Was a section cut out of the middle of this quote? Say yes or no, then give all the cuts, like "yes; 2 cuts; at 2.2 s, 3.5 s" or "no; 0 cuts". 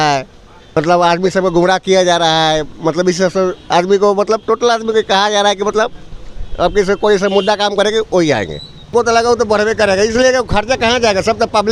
yes; 2 cuts; at 0.8 s, 8.9 s